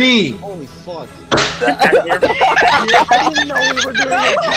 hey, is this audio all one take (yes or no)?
yes